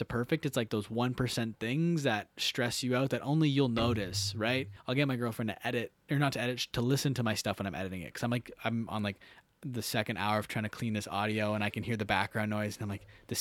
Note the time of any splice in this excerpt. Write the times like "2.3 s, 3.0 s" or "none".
4.7 s